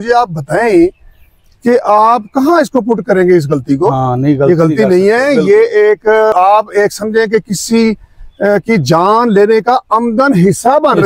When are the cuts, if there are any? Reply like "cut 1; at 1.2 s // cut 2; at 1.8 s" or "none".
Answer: cut 1; at 6.3 s